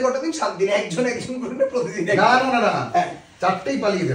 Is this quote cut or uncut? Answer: uncut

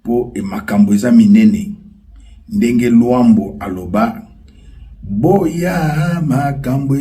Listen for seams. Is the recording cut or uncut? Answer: uncut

